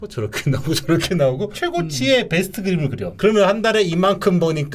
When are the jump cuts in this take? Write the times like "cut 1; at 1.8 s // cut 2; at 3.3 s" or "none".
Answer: none